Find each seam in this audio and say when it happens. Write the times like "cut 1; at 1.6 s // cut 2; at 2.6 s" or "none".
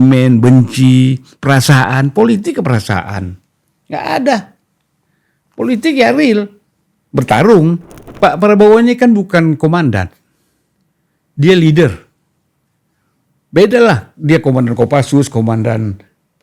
cut 1; at 8.0 s